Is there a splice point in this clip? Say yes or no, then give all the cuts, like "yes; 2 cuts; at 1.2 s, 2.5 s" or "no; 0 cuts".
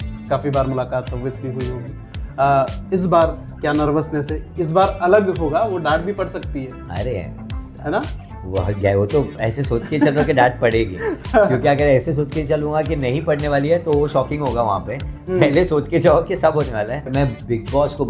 yes; 1 cut; at 17.1 s